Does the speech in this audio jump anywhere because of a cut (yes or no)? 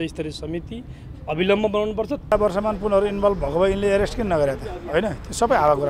yes